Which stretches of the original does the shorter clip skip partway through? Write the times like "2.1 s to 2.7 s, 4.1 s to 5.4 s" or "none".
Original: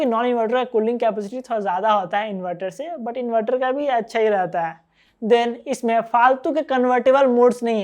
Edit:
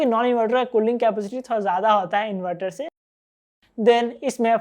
3.2 s to 4.7 s